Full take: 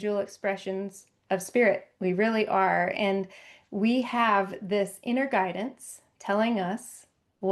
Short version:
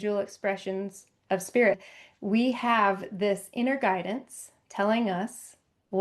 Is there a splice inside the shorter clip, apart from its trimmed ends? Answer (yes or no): yes